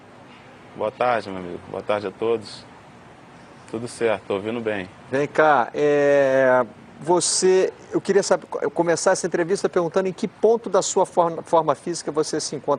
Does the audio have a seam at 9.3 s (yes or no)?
yes